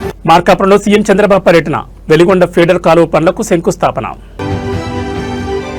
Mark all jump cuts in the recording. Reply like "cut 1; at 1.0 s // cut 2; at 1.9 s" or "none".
none